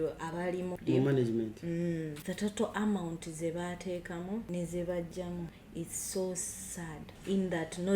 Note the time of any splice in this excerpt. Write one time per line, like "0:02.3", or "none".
0:00.8
0:02.2
0:04.5
0:05.6
0:07.1